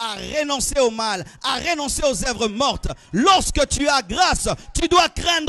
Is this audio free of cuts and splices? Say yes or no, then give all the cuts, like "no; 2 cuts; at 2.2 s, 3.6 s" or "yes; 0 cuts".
yes; 0 cuts